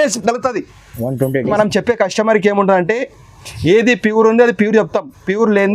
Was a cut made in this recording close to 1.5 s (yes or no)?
yes